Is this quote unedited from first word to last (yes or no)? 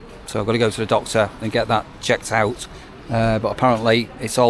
yes